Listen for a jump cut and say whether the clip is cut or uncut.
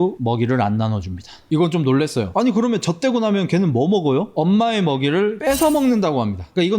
cut